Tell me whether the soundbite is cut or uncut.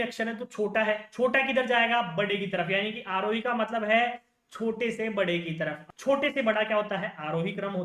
cut